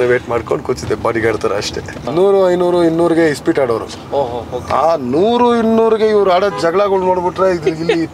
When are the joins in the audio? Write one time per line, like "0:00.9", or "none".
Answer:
0:02.0